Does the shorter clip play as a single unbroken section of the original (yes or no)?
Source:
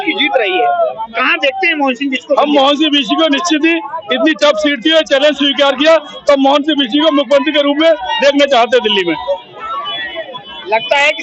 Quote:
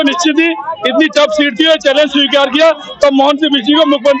yes